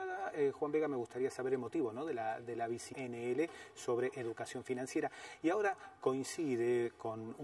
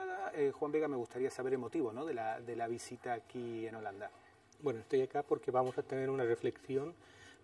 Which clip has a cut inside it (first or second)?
second